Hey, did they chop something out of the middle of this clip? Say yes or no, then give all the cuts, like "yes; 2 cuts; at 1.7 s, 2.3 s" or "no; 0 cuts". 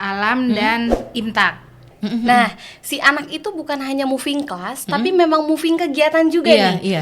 yes; 1 cut; at 1.9 s